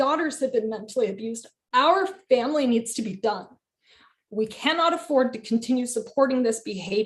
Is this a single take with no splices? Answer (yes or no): yes